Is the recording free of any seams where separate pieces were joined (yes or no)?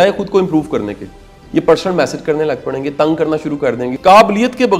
no